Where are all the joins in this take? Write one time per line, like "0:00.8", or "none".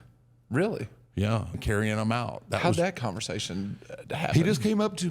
0:01.5